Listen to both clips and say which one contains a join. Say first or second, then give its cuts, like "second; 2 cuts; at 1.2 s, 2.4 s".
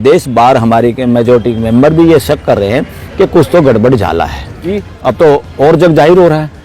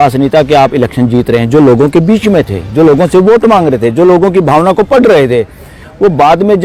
first; 1 cut; at 4.7 s